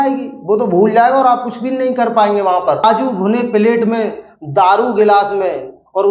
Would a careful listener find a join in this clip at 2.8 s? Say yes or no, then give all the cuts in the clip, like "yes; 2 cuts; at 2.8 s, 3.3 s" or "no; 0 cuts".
yes; 1 cut; at 2.8 s